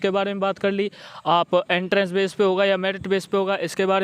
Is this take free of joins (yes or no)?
yes